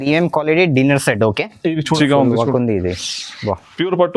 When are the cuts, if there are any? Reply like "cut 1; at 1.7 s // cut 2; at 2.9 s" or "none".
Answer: cut 1; at 2.0 s